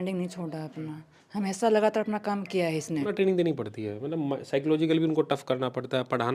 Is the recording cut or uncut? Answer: cut